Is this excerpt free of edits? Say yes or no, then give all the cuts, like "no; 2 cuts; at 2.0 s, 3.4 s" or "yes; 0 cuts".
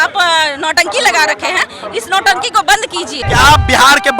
no; 1 cut; at 3.1 s